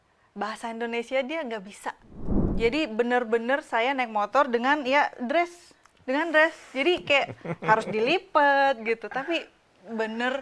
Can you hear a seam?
yes; 1 cut; at 2.5 s

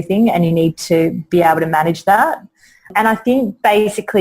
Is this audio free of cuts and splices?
no; 1 cut; at 2.9 s

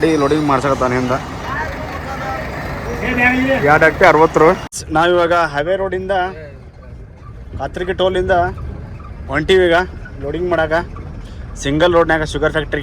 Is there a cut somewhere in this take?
yes; 1 cut; at 4.7 s

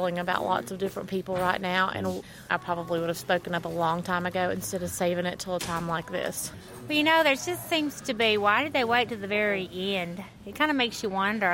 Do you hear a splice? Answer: yes; 1 cut; at 2.4 s

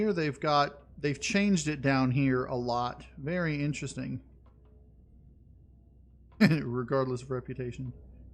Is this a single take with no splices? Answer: yes; 0 cuts

